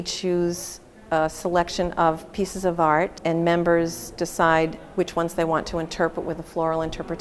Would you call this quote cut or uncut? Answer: cut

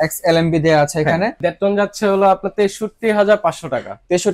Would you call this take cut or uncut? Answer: cut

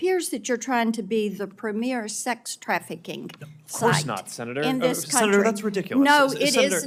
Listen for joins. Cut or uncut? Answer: uncut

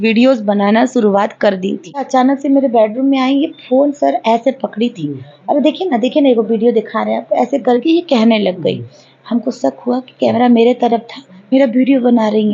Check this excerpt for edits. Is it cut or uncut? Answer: cut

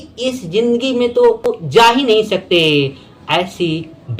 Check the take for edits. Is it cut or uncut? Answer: uncut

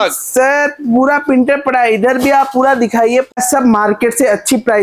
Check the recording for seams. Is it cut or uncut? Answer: cut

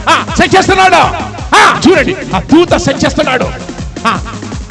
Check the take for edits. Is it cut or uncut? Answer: cut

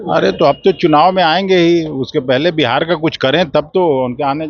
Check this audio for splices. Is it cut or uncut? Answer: uncut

